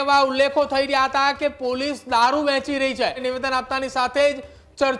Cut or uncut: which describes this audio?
cut